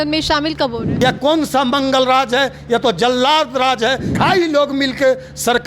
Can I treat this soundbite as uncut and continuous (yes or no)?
no